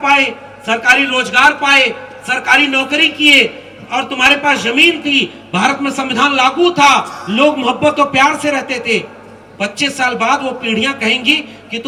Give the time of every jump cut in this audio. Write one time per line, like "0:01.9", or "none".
none